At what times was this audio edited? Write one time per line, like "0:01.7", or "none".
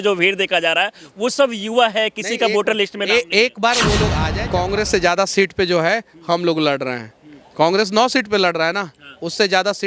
0:04.3